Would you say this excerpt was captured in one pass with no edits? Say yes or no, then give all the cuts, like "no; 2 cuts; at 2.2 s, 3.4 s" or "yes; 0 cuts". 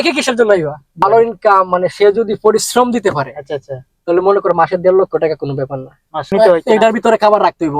no; 2 cuts; at 1.0 s, 6.3 s